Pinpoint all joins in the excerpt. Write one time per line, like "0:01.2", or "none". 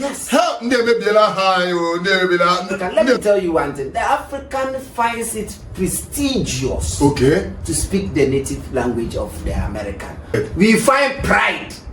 0:02.8
0:10.3